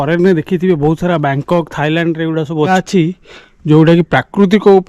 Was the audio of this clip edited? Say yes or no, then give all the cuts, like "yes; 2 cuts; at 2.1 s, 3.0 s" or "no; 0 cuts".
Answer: yes; 1 cut; at 2.7 s